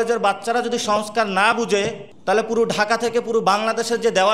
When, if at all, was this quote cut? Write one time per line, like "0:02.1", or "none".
0:02.1